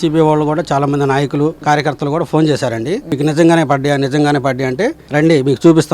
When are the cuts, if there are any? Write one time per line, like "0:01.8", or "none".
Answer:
0:01.6
0:03.1
0:05.0